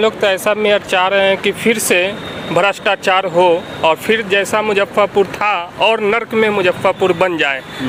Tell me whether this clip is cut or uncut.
uncut